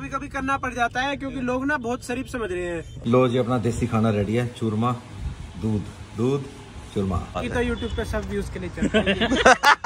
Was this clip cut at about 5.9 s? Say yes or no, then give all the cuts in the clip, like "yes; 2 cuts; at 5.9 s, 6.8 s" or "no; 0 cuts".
no; 2 cuts; at 2.9 s, 7.4 s